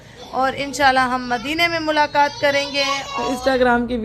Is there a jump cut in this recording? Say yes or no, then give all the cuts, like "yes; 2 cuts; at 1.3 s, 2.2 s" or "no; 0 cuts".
yes; 1 cut; at 3.0 s